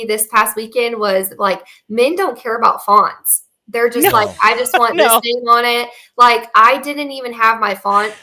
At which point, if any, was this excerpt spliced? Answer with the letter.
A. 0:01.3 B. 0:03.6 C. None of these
C